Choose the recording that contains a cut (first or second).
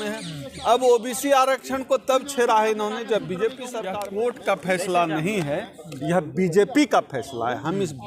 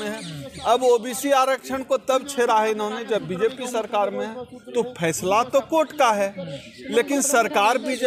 first